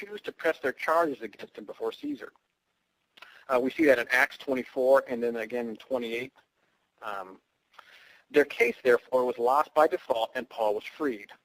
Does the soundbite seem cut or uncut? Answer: uncut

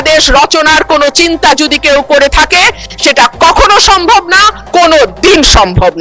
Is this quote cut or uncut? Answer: uncut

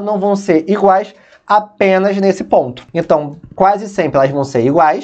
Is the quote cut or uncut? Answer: cut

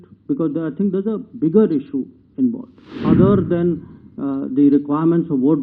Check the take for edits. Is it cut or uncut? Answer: cut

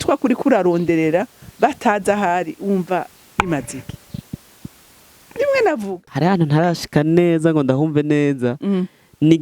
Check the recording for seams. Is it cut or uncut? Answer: cut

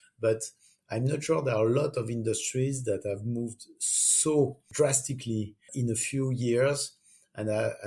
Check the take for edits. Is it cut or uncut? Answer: cut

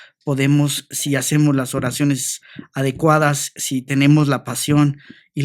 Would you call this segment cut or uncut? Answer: uncut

